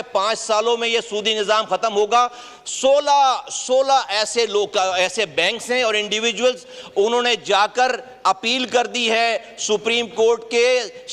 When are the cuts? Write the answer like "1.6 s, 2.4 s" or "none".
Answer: none